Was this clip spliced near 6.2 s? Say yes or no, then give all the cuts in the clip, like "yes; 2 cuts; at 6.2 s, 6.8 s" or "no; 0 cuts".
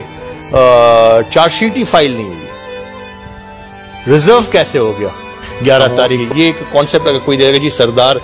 yes; 1 cut; at 6.2 s